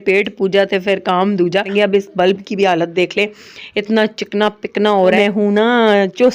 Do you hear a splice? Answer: yes; 2 cuts; at 1.7 s, 5.2 s

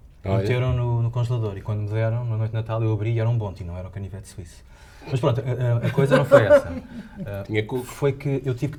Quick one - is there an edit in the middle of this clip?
no; 0 cuts

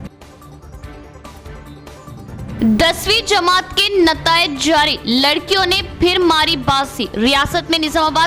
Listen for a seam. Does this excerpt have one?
no; 0 cuts

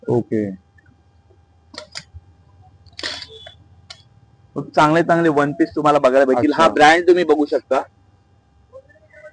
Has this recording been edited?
no; 0 cuts

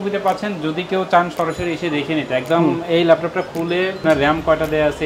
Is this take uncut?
no; 1 cut; at 4.0 s

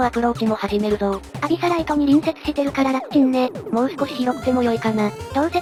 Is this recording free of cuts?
yes; 0 cuts

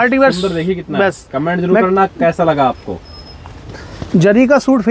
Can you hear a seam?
no; 0 cuts

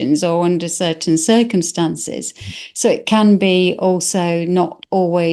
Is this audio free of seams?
yes; 0 cuts

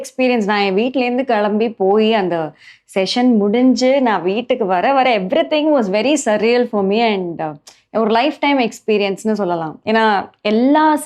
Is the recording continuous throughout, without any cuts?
yes; 0 cuts

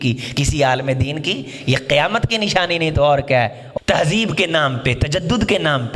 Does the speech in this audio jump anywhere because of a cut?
yes; 1 cut; at 3.6 s

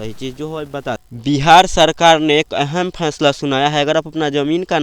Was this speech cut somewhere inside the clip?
yes; 1 cut; at 1.2 s

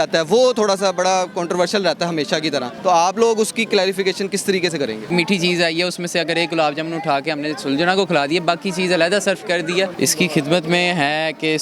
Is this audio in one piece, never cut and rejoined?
no; 3 cuts; at 2.7 s, 5.1 s, 9.9 s

